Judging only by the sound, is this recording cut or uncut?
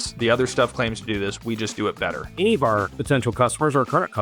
cut